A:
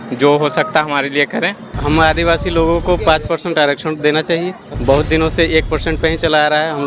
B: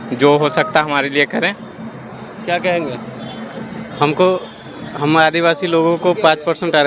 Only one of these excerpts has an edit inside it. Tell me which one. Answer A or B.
A